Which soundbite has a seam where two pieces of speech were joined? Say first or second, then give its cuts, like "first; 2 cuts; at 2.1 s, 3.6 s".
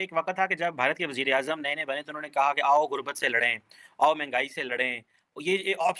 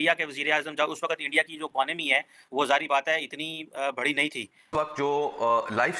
second; 1 cut; at 4.7 s